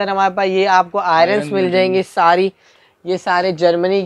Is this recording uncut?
no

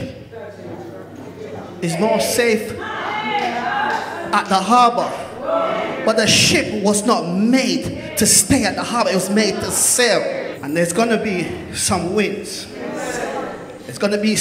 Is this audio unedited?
no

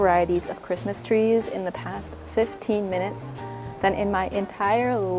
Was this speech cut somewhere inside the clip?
no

